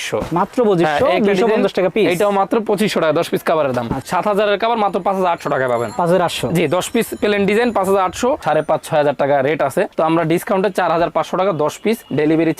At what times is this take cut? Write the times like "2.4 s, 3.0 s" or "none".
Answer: 4.0 s, 8.4 s